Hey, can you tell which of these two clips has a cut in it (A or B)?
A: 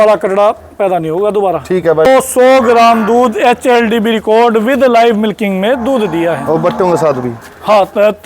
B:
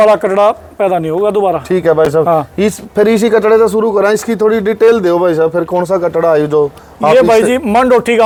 A